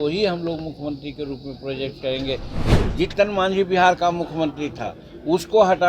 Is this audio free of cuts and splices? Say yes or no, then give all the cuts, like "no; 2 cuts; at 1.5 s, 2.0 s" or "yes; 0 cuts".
no; 1 cut; at 2.7 s